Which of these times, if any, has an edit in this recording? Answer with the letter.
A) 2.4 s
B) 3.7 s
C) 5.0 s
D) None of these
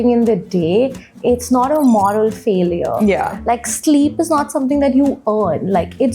D